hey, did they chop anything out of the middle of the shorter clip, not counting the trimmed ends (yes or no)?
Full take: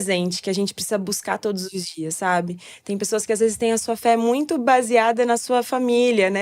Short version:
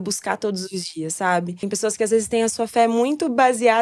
yes